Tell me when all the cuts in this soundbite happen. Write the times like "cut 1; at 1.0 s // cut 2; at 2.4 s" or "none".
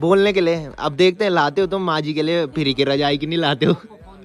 none